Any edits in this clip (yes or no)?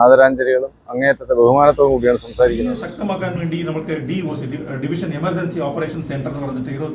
yes